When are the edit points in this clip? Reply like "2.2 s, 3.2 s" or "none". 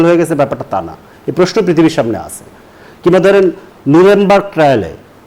none